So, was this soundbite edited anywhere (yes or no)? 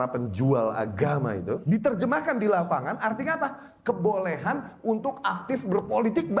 yes